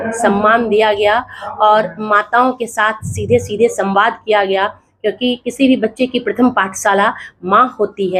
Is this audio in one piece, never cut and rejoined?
yes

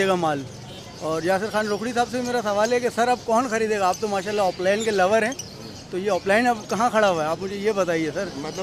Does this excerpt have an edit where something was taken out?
no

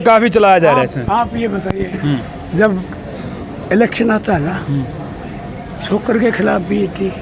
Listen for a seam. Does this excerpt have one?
no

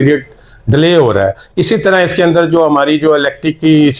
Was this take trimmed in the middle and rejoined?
no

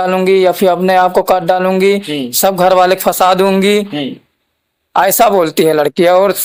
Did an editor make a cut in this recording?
no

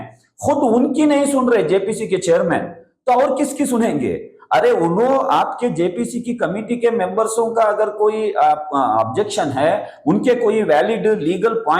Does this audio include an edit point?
no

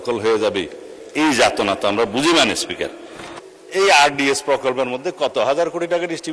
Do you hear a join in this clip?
yes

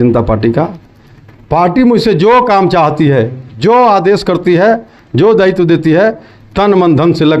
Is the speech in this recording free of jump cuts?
yes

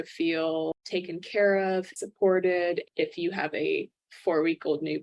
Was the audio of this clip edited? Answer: no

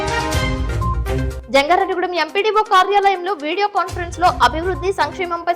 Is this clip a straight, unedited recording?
no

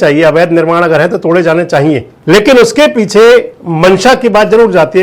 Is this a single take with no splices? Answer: no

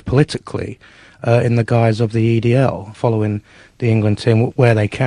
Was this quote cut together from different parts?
yes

